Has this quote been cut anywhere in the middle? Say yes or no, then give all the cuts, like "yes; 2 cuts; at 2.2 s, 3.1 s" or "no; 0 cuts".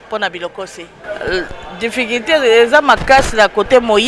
yes; 1 cut; at 0.9 s